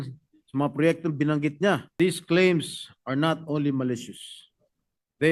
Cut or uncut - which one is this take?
cut